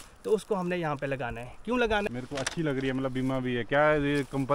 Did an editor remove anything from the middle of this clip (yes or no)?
yes